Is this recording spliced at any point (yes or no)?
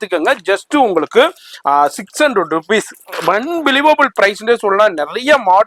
no